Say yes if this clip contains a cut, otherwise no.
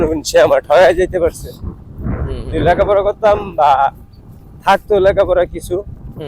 no